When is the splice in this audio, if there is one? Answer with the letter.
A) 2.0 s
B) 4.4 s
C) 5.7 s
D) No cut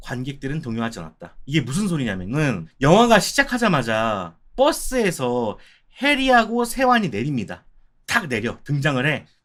D